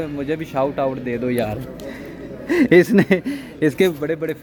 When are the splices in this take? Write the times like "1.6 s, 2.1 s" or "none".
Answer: none